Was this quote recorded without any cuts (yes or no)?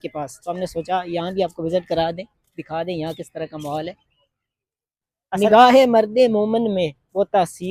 no